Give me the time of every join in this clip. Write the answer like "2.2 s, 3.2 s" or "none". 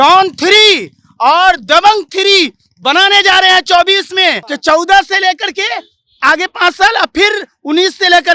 4.5 s